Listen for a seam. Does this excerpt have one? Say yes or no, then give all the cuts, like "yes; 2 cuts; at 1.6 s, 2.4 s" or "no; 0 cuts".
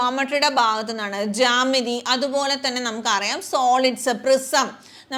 no; 0 cuts